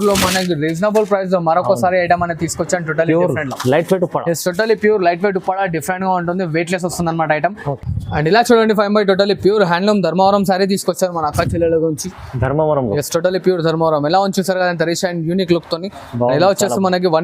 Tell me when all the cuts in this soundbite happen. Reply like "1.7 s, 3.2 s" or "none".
7.7 s